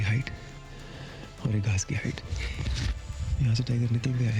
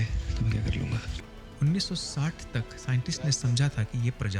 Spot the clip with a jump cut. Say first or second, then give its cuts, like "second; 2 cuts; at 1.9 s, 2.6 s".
second; 1 cut; at 1.1 s